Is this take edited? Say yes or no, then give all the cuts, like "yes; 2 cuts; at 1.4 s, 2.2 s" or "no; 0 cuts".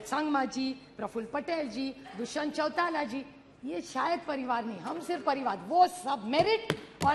no; 0 cuts